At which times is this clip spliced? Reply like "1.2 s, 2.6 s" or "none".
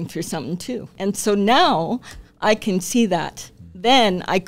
1.0 s